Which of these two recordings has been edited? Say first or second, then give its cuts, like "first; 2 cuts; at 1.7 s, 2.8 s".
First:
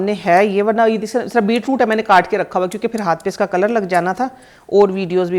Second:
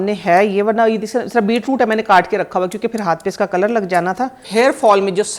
second; 1 cut; at 4.4 s